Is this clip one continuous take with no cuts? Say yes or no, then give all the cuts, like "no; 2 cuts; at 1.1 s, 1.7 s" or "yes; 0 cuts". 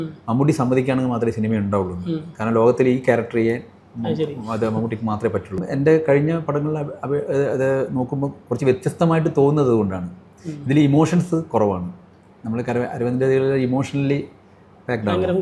no; 1 cut; at 5.7 s